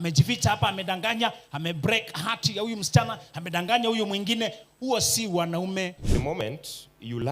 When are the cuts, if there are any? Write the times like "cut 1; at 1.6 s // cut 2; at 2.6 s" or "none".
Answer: cut 1; at 6.1 s